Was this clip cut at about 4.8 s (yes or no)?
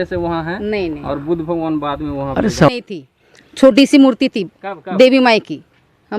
no